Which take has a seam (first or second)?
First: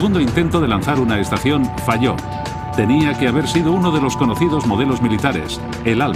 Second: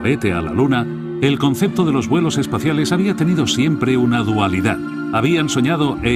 second